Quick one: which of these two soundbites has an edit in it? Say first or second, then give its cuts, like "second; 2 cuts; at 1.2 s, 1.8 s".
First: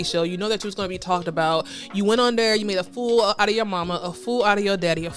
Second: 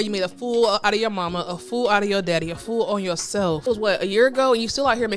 second; 1 cut; at 3.6 s